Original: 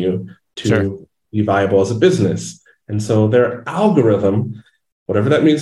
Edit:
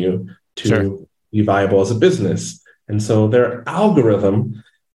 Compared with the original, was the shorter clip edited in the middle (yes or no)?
no